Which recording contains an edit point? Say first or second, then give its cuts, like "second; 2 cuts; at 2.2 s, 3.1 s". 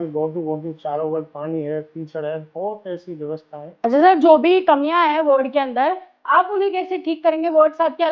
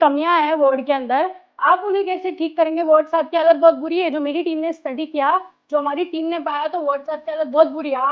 first; 1 cut; at 3.7 s